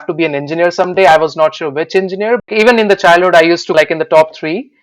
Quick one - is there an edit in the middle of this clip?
yes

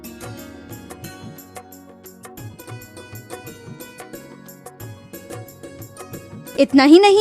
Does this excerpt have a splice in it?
yes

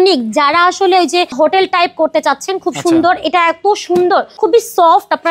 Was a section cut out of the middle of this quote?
yes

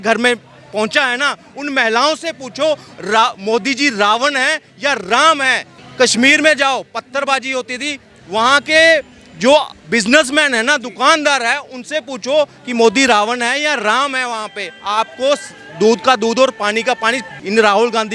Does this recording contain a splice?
no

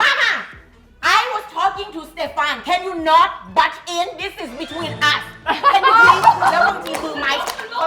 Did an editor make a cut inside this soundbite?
no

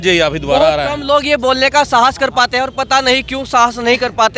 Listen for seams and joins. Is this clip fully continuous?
yes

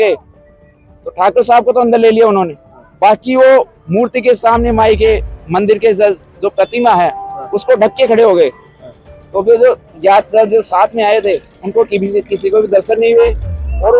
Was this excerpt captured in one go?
yes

